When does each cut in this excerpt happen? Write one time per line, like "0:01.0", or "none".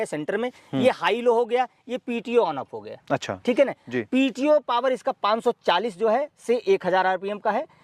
none